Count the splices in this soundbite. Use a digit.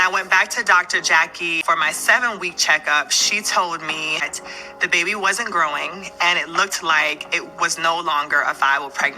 2